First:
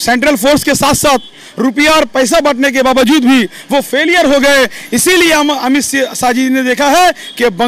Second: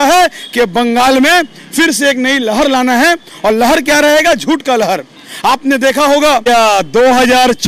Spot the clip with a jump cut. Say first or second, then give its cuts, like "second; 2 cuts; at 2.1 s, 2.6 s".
second; 1 cut; at 6.4 s